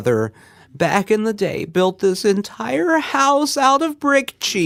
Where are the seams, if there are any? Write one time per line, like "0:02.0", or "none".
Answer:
none